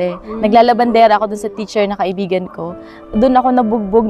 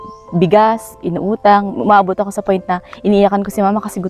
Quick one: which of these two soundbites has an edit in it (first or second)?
first